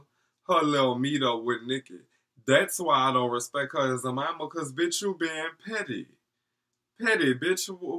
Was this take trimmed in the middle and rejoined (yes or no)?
no